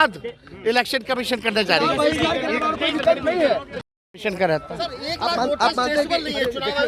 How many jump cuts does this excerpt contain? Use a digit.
0